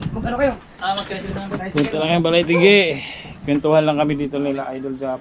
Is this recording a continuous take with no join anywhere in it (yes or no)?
yes